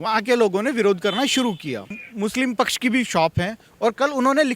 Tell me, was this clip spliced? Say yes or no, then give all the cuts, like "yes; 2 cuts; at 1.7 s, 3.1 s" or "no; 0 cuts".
yes; 1 cut; at 2.0 s